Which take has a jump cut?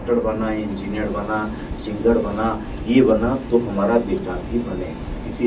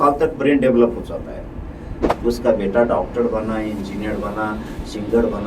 second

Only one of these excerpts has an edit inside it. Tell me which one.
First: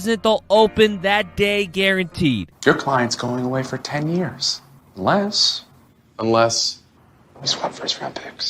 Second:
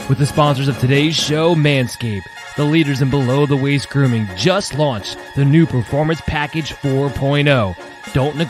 first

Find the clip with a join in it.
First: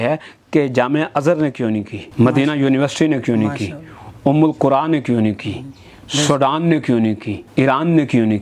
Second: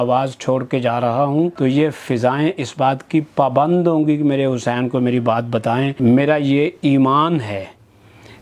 second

